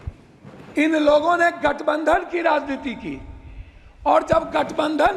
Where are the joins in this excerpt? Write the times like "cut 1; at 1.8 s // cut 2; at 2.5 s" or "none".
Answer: none

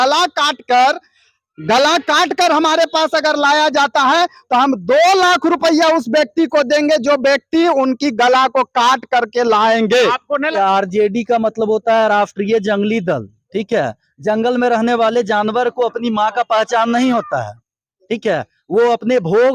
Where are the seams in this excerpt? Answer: cut 1; at 10.5 s

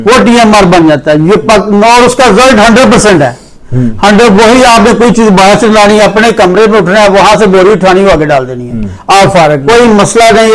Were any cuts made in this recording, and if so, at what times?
cut 1; at 9.6 s

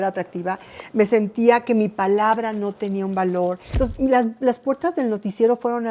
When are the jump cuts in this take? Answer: cut 1; at 3.6 s

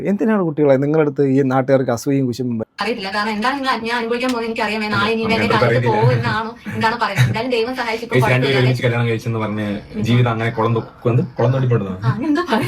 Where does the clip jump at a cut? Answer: cut 1; at 2.7 s

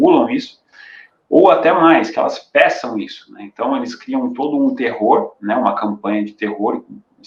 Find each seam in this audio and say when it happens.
none

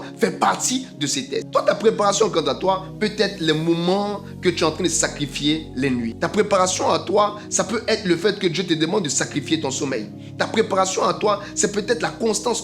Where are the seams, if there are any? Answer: cut 1; at 1.5 s // cut 2; at 6.1 s

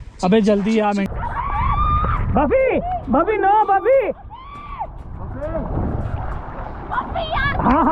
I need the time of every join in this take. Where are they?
cut 1; at 1.1 s

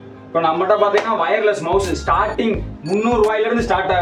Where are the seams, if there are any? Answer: none

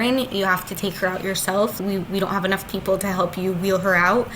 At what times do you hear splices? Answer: cut 1; at 1.7 s

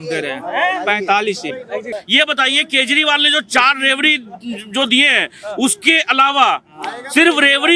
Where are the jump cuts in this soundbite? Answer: cut 1; at 1.9 s

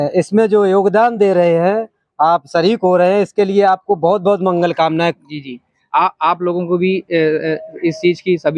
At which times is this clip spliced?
none

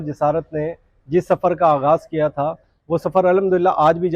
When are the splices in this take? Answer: none

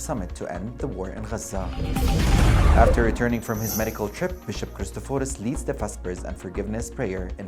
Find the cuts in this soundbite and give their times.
none

